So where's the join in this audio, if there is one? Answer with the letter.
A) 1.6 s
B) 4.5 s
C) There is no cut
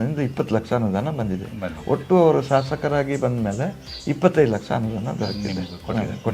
C